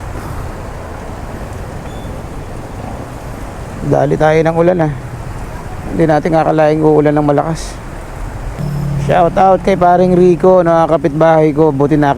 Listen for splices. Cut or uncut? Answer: cut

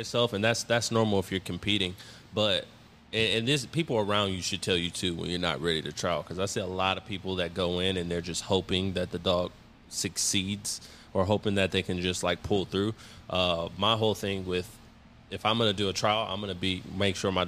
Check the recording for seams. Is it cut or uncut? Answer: uncut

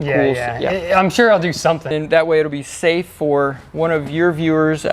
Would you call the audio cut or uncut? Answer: cut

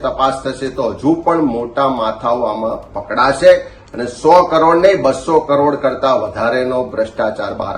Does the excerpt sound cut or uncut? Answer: uncut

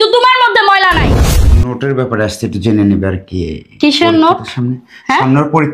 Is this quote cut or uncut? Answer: cut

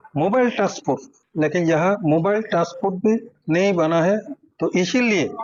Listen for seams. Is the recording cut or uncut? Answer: uncut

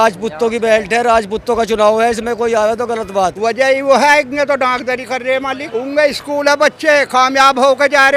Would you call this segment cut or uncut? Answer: cut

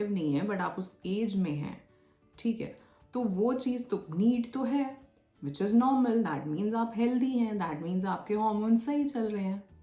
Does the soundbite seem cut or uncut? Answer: uncut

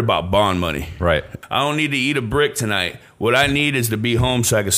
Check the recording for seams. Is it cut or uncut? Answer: cut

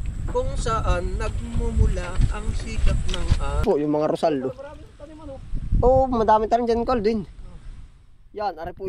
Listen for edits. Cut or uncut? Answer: cut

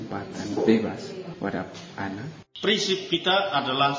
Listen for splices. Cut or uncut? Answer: cut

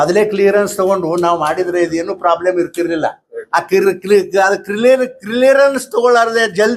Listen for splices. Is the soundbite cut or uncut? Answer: uncut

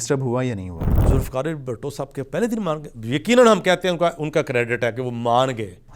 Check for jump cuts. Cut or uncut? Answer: cut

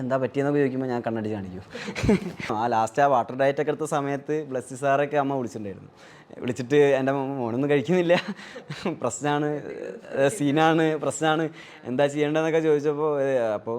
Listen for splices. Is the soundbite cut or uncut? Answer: cut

